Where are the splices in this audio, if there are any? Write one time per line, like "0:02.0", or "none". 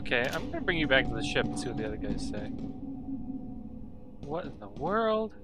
none